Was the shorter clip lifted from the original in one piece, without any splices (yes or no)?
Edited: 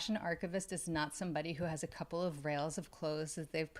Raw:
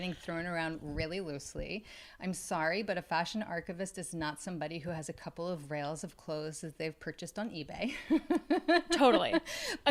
yes